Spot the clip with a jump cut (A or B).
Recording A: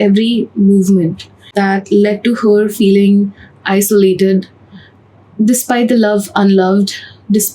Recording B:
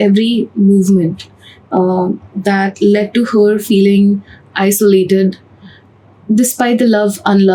A